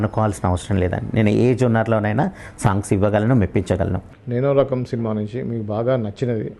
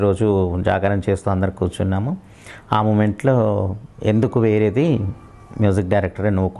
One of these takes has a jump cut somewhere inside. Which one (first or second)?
first